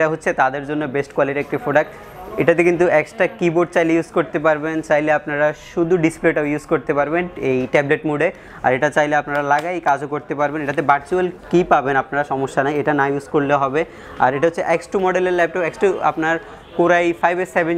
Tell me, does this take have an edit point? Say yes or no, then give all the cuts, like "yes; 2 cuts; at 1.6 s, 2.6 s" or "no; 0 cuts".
no; 0 cuts